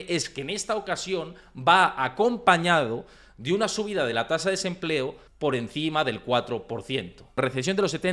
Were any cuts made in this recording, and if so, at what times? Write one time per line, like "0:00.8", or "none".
0:05.2
0:07.4

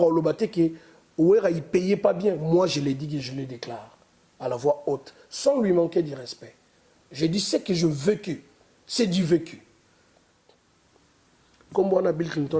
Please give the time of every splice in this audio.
0:10.6

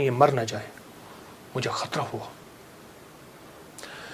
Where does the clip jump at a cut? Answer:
none

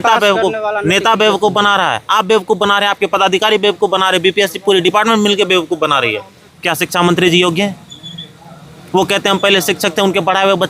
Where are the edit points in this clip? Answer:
0:06.5

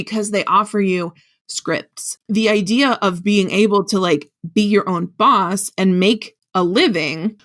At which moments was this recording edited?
0:02.1

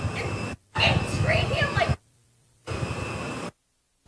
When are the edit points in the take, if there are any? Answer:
0:02.5

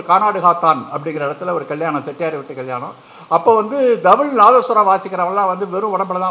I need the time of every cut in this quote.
none

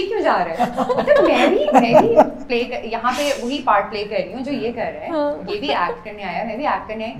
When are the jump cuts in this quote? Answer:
none

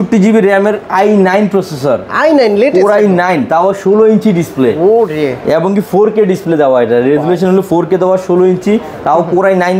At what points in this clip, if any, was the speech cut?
none

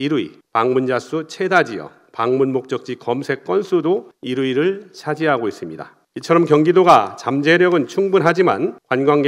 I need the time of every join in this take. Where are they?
none

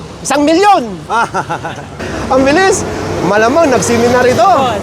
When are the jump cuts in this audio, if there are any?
0:01.9

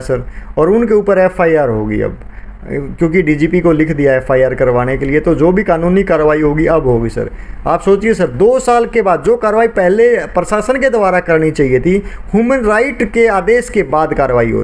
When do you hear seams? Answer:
none

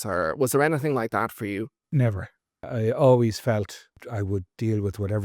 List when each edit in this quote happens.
0:02.7
0:04.0

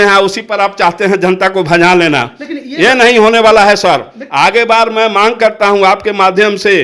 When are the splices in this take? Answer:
none

